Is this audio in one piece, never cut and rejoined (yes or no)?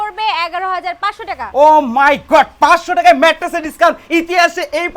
yes